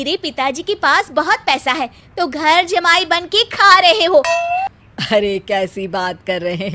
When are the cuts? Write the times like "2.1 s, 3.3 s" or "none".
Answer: 4.7 s